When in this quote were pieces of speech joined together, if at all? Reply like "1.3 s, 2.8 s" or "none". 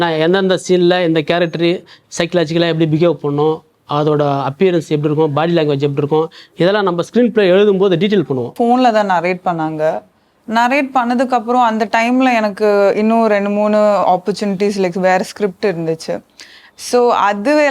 8.5 s